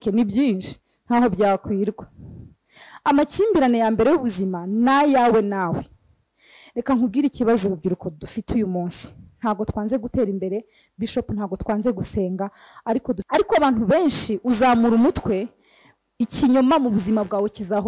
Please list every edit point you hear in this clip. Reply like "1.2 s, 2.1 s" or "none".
13.2 s